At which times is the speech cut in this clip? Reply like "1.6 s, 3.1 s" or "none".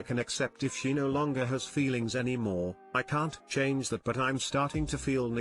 none